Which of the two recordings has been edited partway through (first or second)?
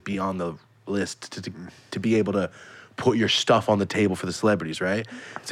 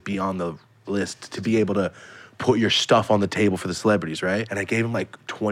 second